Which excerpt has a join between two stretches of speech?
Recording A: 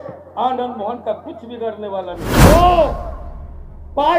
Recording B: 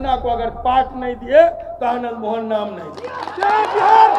A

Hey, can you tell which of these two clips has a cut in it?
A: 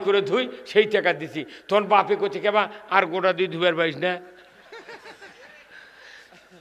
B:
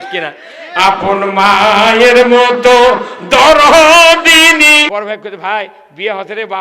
B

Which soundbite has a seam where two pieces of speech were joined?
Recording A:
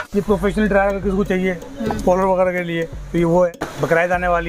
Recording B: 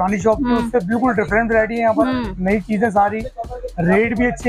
A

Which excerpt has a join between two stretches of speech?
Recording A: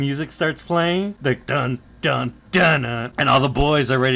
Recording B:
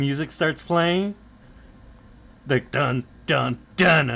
A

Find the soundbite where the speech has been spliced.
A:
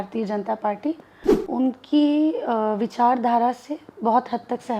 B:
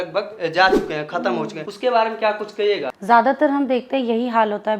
B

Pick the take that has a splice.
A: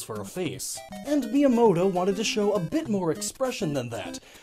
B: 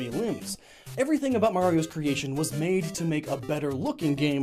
B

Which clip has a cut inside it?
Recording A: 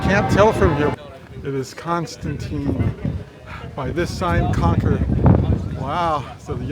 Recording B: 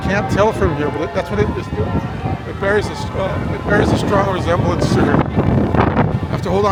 A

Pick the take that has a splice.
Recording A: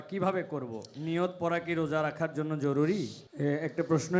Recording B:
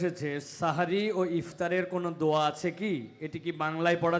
A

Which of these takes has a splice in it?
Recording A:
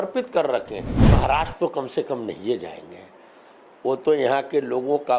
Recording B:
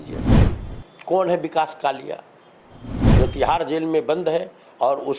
A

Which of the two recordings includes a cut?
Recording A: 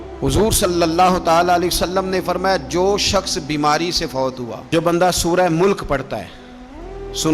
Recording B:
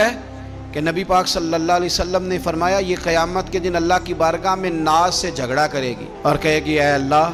A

